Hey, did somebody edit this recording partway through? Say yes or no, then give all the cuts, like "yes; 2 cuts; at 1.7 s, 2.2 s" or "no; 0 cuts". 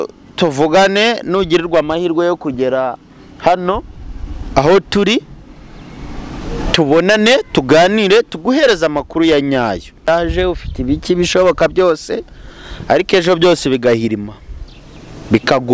yes; 1 cut; at 10.0 s